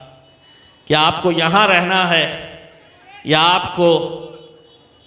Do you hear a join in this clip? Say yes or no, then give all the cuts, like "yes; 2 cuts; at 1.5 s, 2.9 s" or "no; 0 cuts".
no; 0 cuts